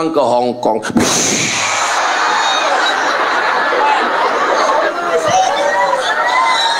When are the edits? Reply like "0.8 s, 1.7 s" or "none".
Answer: none